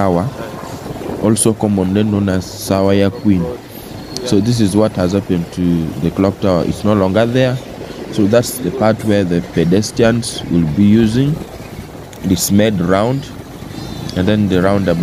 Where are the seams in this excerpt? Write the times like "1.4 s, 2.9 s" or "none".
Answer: none